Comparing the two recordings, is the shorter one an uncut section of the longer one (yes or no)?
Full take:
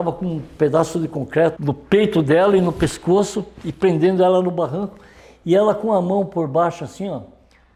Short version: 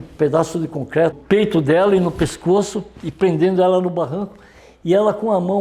no